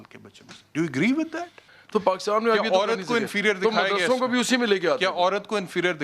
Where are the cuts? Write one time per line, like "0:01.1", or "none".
0:01.7